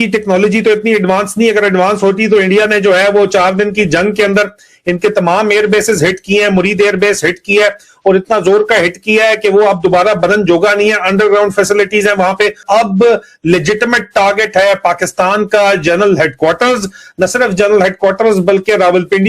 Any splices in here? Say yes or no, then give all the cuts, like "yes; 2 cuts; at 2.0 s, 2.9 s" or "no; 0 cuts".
yes; 1 cut; at 12.6 s